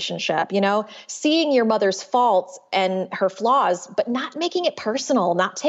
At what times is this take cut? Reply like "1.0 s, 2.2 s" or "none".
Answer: none